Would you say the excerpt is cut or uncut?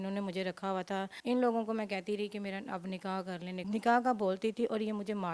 cut